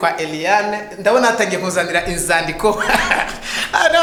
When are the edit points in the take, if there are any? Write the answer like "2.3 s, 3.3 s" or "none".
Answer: none